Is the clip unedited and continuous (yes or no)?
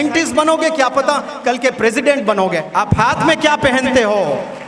no